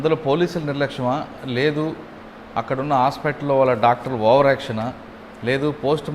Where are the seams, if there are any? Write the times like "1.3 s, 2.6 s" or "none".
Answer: none